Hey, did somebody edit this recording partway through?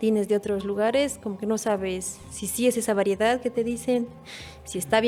no; 0 cuts

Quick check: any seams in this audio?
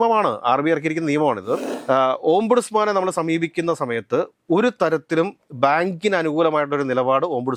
yes; 1 cut; at 1.7 s

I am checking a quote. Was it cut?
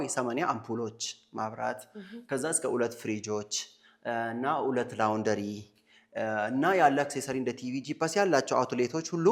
no; 0 cuts

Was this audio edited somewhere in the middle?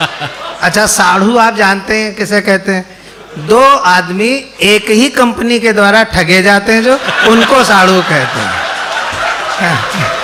no; 0 cuts

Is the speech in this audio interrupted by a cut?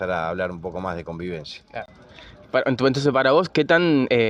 no; 0 cuts

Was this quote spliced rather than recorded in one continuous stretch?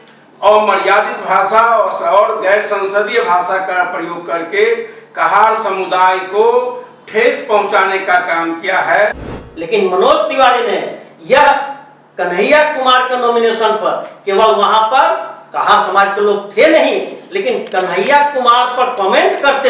yes; 1 cut; at 9.3 s

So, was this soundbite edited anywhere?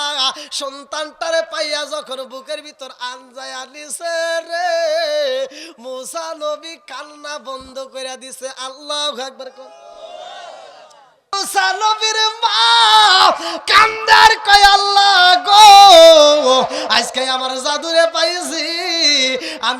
yes; 1 cut; at 11.3 s

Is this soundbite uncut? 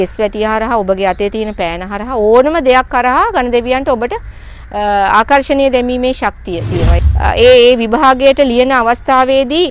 no; 1 cut; at 7.0 s

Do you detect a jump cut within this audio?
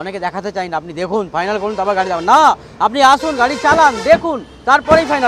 no; 0 cuts

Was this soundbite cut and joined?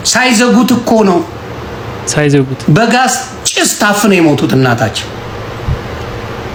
no; 0 cuts

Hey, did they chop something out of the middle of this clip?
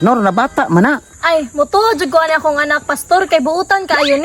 no; 0 cuts

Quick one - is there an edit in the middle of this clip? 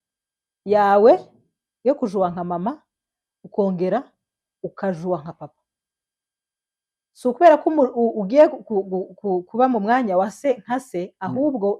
no; 0 cuts

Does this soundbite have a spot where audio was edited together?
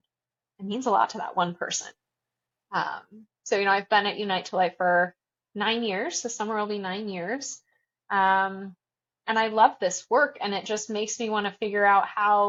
no; 0 cuts

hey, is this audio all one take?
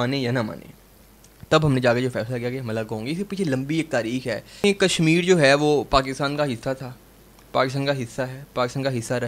no; 1 cut; at 4.6 s

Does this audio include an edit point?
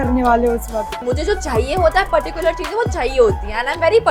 yes; 1 cut; at 1.0 s

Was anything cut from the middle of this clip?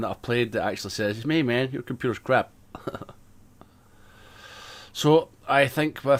no; 0 cuts

